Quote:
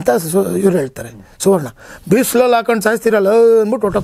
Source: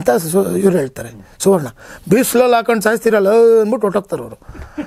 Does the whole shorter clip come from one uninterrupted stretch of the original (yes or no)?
yes